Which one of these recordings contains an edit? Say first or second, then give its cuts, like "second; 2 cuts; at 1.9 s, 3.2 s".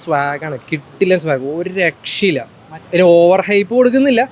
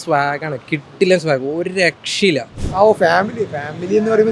second; 1 cut; at 2.6 s